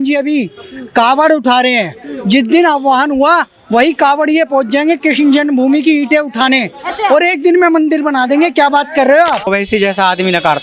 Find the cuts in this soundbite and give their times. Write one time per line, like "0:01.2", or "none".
0:09.5